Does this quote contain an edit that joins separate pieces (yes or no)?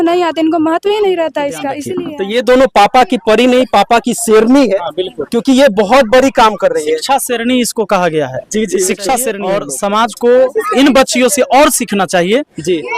yes